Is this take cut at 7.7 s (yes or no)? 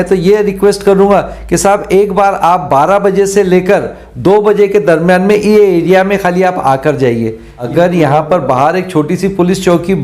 yes